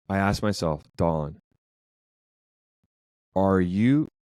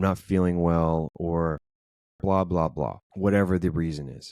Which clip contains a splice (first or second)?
second